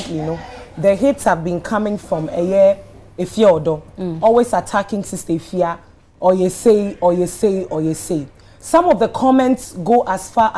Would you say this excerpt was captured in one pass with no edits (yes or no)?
yes